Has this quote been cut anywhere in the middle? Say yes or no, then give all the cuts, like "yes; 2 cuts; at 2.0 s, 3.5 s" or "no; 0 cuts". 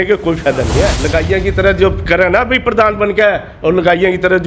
yes; 1 cut; at 1.0 s